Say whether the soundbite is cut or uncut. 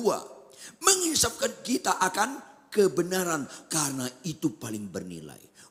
uncut